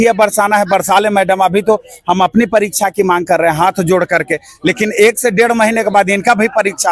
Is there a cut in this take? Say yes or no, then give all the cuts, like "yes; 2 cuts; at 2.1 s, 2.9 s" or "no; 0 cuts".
no; 0 cuts